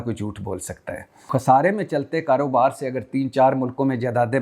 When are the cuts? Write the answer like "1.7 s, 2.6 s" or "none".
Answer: 1.3 s